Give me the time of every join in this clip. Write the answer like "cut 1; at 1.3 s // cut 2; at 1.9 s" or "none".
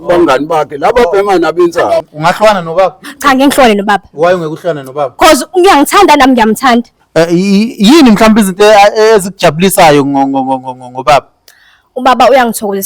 cut 1; at 2.0 s